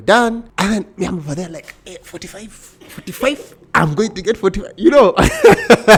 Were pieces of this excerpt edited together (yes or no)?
no